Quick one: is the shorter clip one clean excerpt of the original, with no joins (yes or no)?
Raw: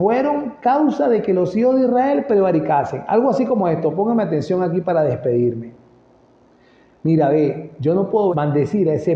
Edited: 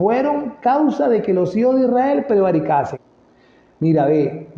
no